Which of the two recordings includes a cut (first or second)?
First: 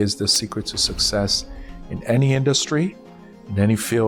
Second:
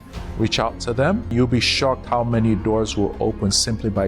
second